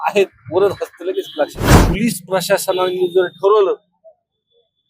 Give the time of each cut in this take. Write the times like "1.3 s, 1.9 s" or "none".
1.7 s